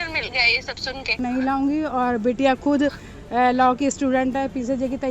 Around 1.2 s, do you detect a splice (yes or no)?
yes